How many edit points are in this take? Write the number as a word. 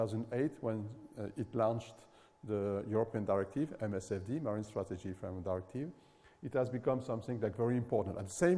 one